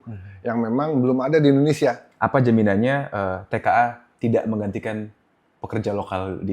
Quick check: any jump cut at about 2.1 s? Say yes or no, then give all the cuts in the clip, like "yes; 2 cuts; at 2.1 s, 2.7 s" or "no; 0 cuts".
yes; 1 cut; at 2.1 s